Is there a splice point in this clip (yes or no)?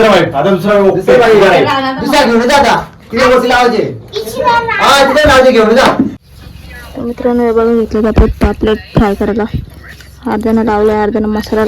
yes